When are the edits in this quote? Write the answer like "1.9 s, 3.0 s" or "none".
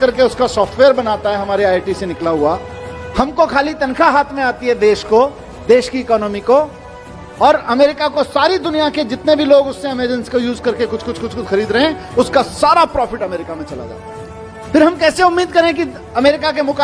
14.0 s